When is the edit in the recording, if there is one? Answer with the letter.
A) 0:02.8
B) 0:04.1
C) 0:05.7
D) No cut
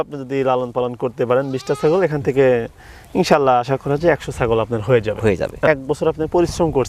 C